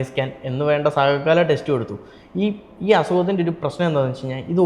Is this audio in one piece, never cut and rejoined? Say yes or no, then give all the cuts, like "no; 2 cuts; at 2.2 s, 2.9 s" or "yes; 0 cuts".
yes; 0 cuts